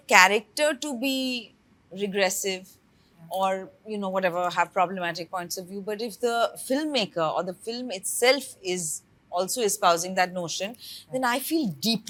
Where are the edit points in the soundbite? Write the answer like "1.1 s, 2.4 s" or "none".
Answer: none